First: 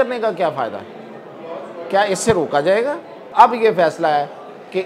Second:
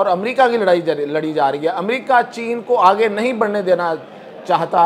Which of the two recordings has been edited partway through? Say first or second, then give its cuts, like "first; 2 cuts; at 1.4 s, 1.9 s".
first; 1 cut; at 3.3 s